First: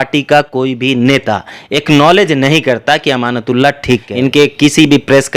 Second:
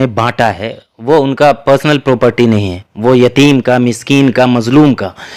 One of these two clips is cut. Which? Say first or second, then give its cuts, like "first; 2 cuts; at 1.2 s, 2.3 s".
first; 1 cut; at 4.1 s